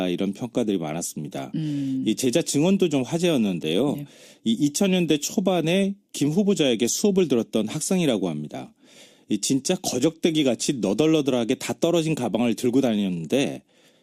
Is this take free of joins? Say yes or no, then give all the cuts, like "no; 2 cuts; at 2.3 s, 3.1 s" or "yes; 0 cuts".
yes; 0 cuts